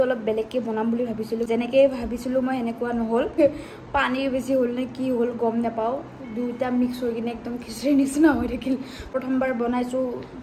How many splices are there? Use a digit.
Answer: 3